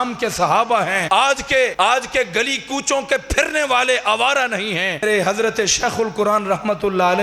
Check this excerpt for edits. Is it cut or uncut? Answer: cut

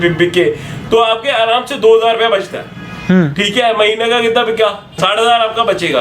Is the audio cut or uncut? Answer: cut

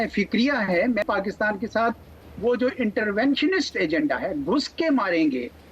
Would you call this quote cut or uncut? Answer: cut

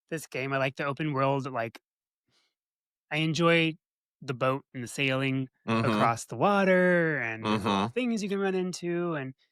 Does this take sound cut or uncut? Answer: uncut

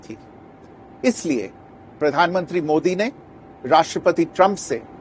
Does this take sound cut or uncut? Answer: uncut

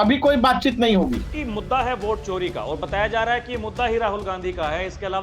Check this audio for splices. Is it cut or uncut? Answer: cut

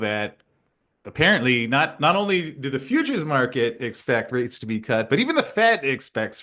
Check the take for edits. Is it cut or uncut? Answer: uncut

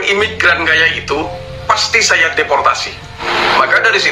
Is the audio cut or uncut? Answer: cut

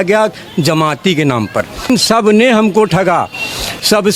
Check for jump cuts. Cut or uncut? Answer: cut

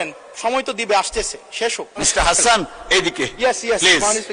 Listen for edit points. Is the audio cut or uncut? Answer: cut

